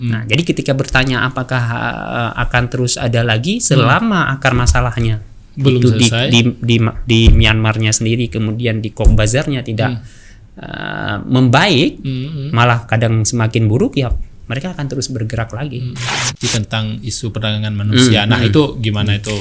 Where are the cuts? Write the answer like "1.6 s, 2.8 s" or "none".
16.3 s